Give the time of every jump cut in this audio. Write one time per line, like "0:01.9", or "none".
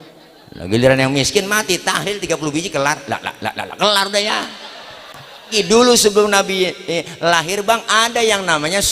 0:05.5

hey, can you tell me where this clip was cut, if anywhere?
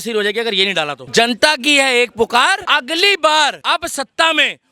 0:01.0
0:02.6
0:03.6

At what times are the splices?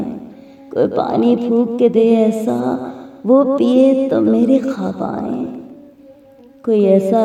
none

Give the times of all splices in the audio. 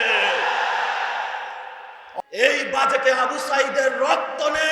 0:02.1

